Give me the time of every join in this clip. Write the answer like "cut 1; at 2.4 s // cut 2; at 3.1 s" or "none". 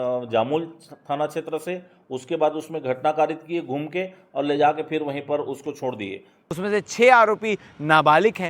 cut 1; at 6.4 s

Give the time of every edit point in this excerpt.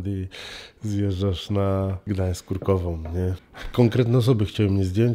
cut 1; at 2.0 s // cut 2; at 3.5 s

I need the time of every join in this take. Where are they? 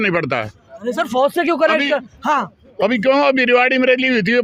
none

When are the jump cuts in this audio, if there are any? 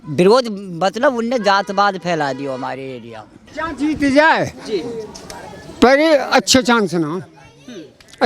cut 1; at 3.4 s

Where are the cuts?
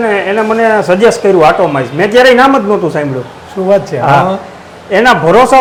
none

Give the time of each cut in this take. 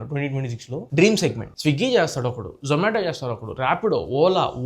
cut 1; at 1.4 s

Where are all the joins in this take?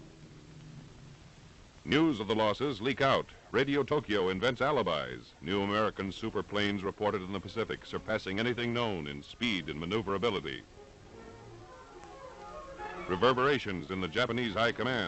cut 1; at 10.3 s

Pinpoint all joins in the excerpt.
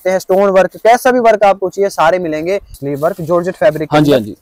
cut 1; at 2.7 s

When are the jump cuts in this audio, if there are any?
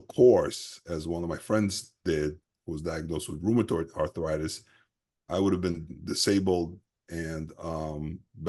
none

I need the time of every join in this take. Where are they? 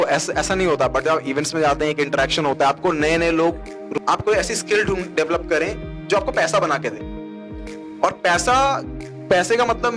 cut 1; at 3.8 s

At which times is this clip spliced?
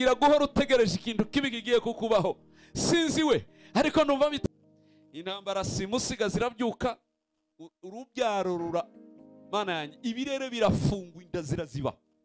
cut 1; at 4.4 s

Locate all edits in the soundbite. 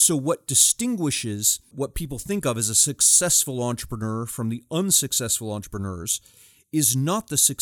cut 1; at 1.7 s

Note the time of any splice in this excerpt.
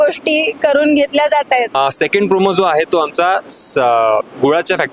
cut 1; at 1.7 s

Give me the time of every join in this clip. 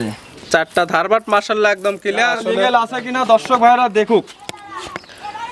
cut 1; at 2.4 s

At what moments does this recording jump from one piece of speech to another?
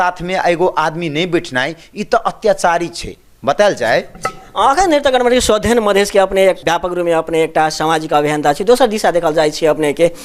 none

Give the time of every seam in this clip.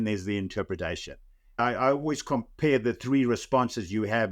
cut 1; at 1.6 s

